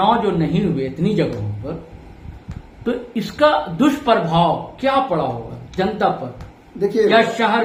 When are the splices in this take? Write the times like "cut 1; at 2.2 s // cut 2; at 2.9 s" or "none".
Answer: none